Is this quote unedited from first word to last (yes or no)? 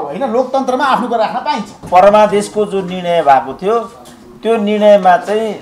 yes